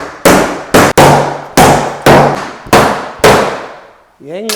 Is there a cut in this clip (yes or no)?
yes